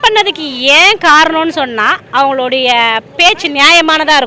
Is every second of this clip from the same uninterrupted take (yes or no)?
yes